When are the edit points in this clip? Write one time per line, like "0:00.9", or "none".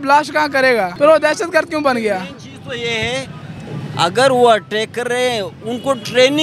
0:00.9